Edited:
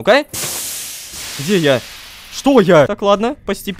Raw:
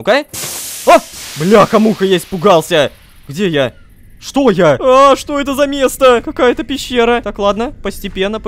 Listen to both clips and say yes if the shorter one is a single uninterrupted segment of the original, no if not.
no